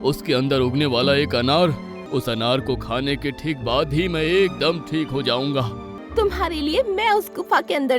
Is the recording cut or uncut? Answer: cut